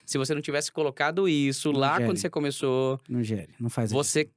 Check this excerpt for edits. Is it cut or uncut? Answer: uncut